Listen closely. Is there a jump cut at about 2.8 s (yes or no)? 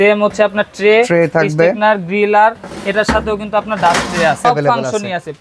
no